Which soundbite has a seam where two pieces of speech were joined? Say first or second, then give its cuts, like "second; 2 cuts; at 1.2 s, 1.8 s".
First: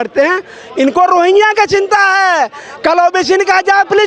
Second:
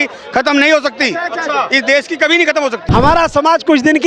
second; 1 cut; at 2.8 s